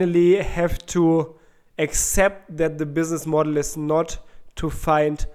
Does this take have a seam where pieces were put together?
no; 0 cuts

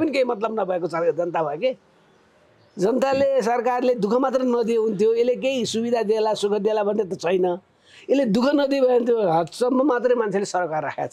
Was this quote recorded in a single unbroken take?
yes; 0 cuts

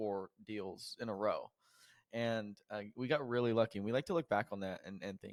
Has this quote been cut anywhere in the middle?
no; 0 cuts

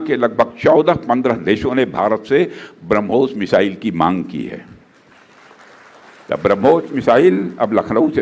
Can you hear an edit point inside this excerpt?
no; 0 cuts

